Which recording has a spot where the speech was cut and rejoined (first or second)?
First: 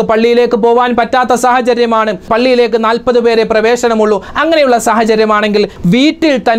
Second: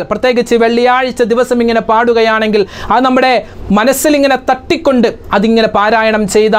first